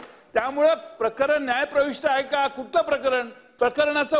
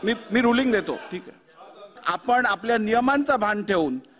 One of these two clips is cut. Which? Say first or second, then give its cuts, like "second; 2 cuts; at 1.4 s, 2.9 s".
second; 1 cut; at 2.0 s